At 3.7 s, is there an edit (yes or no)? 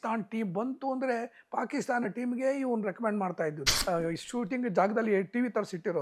yes